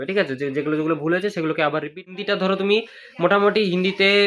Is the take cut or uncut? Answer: cut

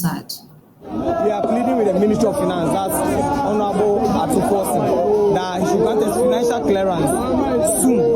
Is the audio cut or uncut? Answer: cut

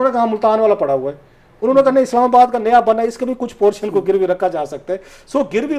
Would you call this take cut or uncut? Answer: uncut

